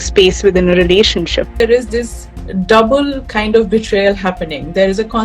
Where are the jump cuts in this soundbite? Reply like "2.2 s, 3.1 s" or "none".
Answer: 1.6 s